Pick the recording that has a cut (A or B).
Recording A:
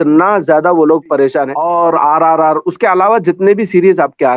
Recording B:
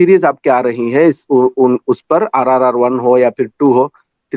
A